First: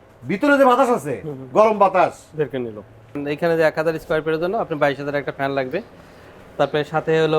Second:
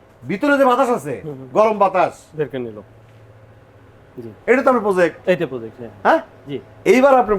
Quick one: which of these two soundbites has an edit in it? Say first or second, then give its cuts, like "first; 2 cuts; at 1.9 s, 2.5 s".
first; 1 cut; at 3.2 s